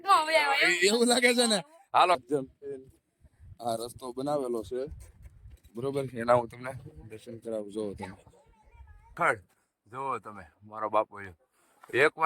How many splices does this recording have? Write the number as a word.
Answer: two